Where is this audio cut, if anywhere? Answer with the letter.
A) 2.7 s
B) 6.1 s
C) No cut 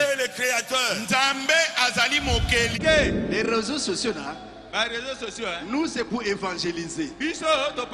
A